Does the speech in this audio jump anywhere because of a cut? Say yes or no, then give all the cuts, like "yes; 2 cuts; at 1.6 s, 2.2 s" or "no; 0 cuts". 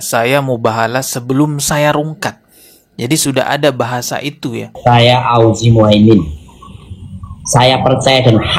yes; 1 cut; at 4.7 s